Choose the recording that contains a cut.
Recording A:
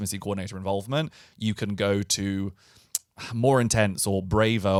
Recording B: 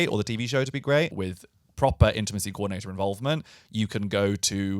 B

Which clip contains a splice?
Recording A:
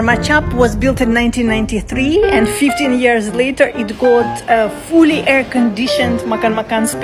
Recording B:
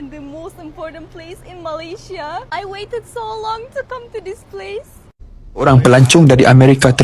B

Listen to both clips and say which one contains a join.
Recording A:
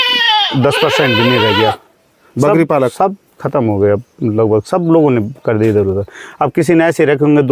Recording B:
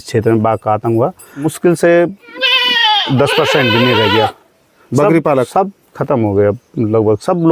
B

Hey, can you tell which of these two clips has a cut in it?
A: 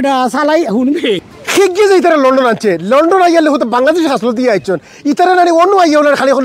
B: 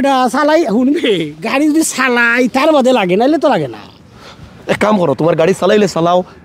A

